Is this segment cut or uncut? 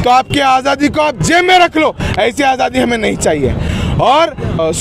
uncut